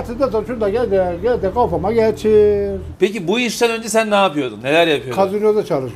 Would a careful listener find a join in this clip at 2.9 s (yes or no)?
yes